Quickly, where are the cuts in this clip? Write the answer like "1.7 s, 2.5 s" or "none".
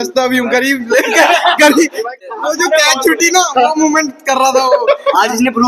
2.2 s